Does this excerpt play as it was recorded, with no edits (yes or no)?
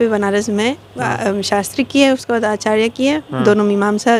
yes